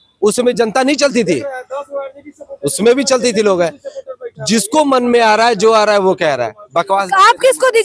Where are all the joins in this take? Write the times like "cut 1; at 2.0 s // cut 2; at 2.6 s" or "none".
none